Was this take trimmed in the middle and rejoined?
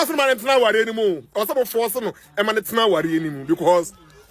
no; 0 cuts

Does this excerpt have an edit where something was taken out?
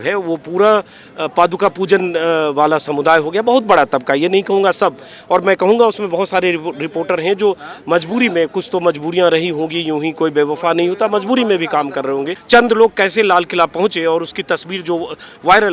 yes; 1 cut; at 12.3 s

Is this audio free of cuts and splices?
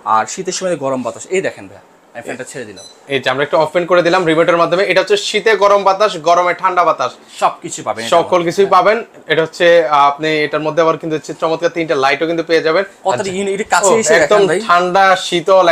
yes; 0 cuts

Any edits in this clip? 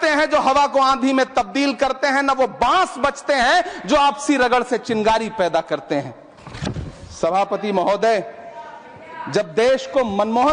no; 0 cuts

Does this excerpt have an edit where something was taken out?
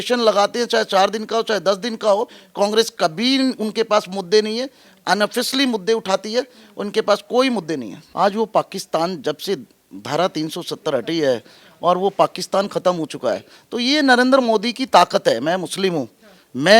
yes; 1 cut; at 8.0 s

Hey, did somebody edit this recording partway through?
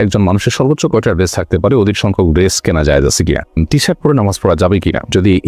yes; 1 cut; at 3.6 s

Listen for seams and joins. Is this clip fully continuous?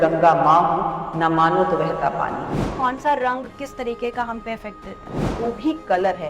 no; 2 cuts; at 2.6 s, 5.2 s

